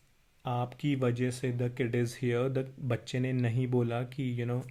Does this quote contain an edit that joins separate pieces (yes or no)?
no